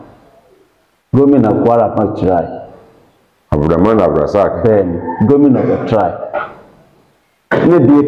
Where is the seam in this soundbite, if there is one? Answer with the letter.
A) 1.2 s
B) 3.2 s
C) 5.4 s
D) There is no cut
D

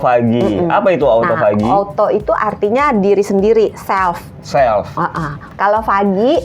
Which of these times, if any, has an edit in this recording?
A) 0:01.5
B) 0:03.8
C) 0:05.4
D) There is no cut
C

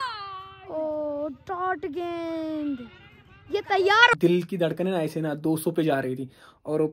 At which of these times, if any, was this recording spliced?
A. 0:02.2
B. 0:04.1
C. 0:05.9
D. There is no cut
B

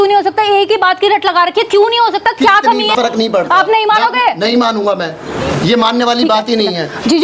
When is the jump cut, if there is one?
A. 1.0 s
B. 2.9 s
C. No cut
B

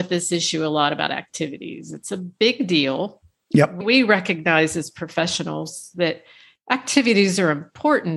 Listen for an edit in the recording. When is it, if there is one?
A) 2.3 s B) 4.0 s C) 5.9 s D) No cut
D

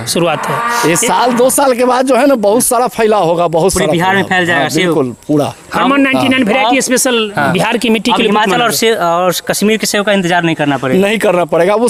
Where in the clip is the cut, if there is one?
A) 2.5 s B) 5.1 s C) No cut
C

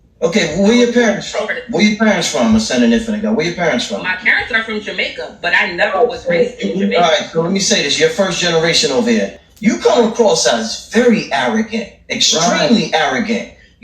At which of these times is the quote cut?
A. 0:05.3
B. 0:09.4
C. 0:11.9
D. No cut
B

